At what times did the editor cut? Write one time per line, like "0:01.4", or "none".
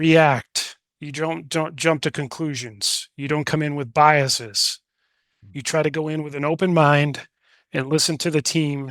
none